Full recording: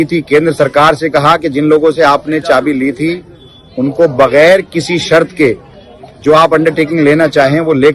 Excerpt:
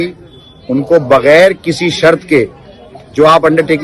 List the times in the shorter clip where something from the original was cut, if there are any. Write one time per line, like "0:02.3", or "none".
none